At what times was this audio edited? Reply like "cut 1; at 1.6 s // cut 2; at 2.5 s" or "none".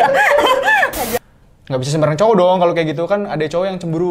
cut 1; at 1.2 s